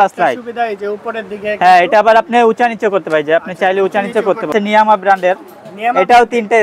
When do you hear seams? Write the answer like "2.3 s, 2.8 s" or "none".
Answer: 4.5 s